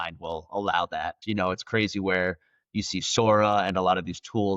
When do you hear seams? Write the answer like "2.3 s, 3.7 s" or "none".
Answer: 1.2 s